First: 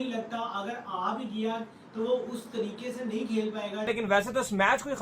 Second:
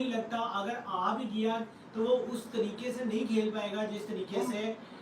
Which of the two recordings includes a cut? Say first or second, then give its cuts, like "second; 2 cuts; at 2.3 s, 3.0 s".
first; 1 cut; at 4.0 s